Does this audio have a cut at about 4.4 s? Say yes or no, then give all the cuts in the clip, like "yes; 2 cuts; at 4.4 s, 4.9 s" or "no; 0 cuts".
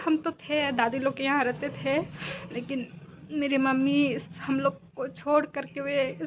no; 0 cuts